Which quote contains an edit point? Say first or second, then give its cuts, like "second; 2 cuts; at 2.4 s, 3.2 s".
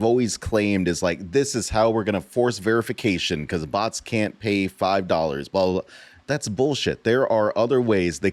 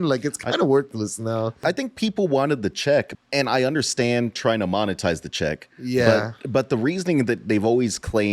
second; 2 cuts; at 1.6 s, 3.1 s